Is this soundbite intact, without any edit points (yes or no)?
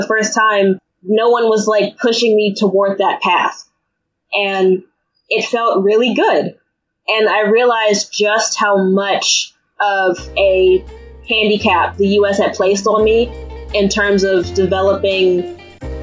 yes